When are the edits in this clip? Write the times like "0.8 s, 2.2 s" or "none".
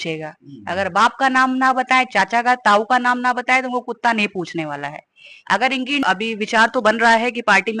6.0 s